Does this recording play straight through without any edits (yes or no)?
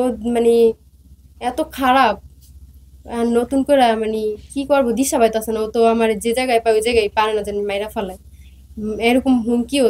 yes